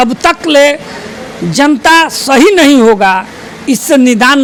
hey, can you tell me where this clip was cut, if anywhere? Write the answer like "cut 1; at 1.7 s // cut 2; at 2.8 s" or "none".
none